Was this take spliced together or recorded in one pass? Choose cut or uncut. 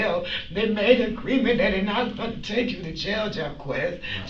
uncut